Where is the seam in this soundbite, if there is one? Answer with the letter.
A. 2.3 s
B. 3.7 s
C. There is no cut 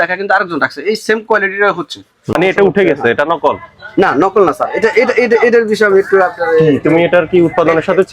A